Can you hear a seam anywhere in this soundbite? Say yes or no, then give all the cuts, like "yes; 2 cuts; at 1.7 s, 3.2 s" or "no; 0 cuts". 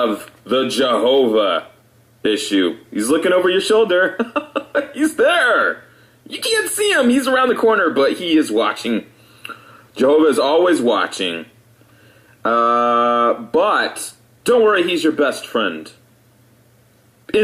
no; 0 cuts